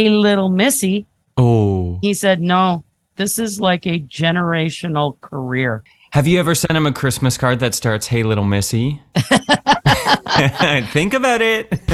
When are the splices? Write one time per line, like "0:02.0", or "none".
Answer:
0:02.0
0:03.1
0:05.9